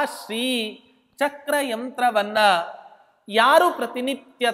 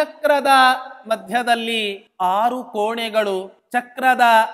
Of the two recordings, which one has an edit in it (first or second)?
second